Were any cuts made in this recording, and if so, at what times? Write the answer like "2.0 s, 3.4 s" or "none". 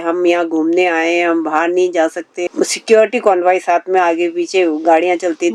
2.4 s